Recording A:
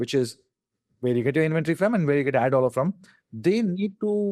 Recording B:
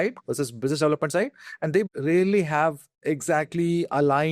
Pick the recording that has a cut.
B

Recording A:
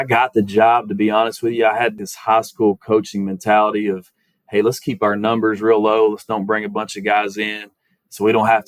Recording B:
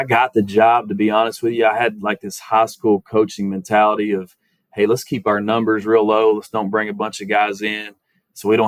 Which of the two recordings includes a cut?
A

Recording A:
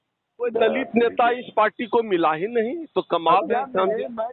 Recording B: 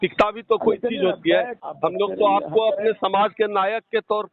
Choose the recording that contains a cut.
B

